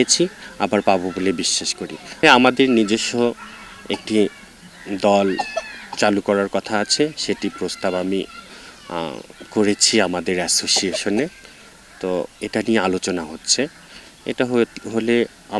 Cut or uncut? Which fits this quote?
cut